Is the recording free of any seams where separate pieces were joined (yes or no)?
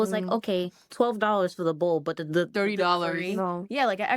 yes